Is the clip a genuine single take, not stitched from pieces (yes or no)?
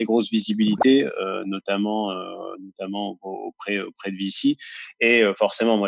yes